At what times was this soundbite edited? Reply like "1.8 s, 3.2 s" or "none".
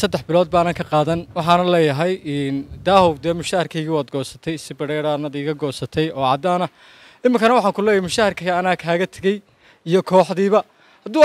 none